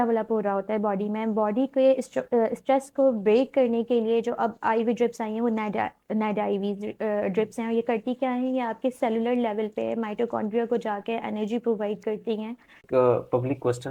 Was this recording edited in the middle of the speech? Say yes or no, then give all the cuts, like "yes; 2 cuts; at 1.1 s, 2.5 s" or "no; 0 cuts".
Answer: yes; 1 cut; at 12.8 s